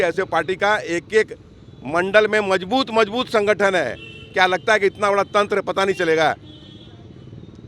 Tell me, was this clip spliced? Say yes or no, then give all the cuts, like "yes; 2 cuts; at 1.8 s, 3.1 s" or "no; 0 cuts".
no; 0 cuts